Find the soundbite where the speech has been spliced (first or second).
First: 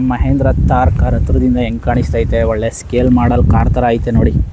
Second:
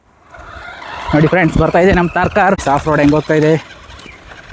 second